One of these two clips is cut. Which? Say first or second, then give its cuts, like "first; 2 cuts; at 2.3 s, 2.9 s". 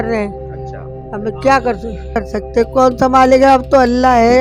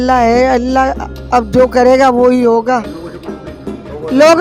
first; 1 cut; at 2.2 s